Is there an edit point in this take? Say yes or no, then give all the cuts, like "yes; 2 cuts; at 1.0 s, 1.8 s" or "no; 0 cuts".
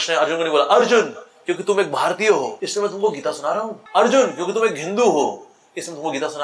yes; 2 cuts; at 2.6 s, 3.8 s